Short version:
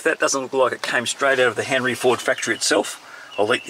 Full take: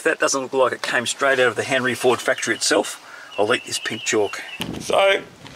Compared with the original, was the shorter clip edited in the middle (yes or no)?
no